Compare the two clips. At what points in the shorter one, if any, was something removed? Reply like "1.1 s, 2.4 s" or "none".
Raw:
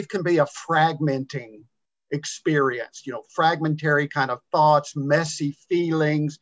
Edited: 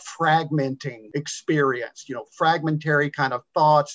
0.9 s